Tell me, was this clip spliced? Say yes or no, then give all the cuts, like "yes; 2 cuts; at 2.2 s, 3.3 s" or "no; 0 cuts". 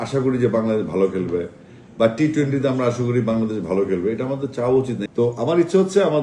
yes; 1 cut; at 5.0 s